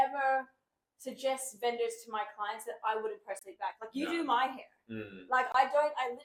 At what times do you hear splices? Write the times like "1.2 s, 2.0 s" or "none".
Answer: none